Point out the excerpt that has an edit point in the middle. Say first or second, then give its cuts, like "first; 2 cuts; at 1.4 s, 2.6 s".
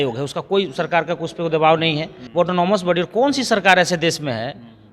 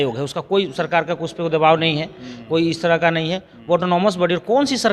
first; 1 cut; at 2.2 s